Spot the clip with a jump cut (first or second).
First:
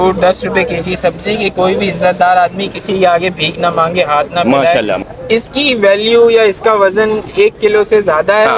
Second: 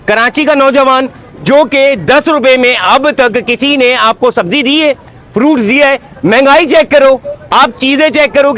first